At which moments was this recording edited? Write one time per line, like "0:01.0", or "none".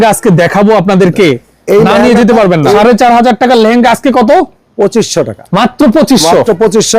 0:02.8
0:05.4